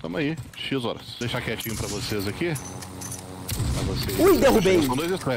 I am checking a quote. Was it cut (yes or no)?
yes